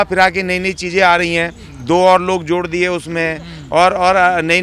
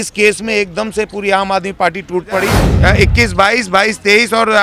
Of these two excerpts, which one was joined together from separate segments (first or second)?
second